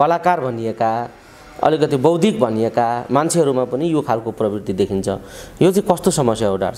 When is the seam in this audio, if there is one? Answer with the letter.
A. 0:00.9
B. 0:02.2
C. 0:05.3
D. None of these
D